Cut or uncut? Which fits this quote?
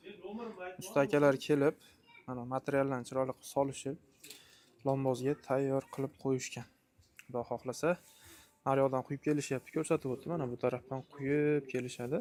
uncut